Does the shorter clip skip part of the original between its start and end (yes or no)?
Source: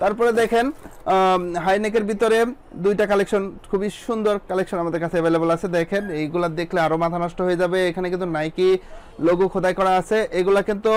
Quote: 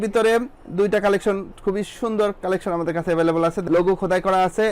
yes